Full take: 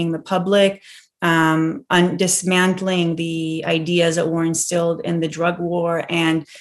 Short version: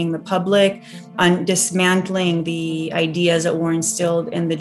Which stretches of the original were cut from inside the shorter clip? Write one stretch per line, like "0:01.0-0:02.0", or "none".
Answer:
0:01.1-0:01.8